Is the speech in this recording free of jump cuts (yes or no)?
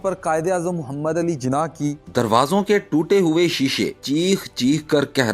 no